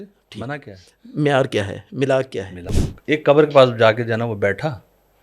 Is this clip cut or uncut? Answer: cut